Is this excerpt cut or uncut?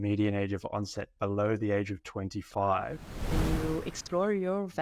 cut